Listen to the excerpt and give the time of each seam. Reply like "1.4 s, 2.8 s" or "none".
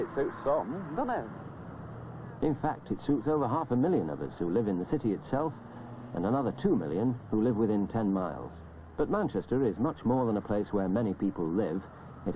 4.9 s